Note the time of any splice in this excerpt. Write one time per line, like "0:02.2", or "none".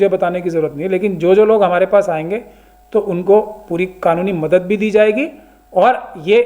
none